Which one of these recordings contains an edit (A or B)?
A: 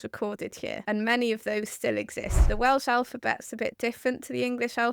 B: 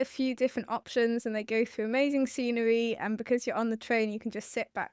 A